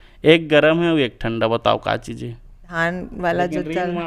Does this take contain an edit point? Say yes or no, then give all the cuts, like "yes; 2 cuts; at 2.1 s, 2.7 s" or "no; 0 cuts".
yes; 1 cut; at 2.7 s